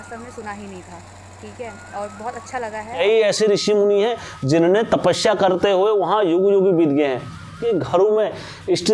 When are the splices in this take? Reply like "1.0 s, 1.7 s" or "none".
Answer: 3.0 s, 7.6 s